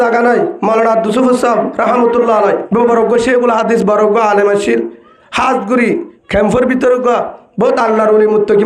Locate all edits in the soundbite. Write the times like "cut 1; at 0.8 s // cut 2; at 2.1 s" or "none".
cut 1; at 2.6 s